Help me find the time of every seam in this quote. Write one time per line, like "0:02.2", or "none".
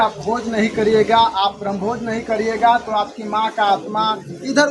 none